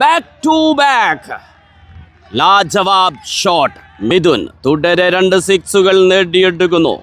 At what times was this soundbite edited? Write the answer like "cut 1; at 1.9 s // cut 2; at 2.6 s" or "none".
cut 1; at 4.1 s